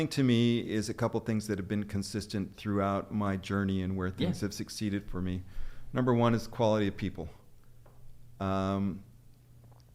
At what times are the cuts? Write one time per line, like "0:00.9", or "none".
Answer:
none